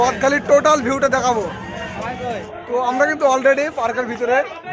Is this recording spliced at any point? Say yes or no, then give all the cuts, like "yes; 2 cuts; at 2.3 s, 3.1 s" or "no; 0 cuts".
yes; 1 cut; at 2.6 s